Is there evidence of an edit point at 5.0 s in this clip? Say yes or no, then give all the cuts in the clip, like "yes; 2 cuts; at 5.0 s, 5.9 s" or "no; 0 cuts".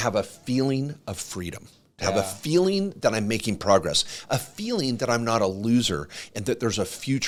no; 0 cuts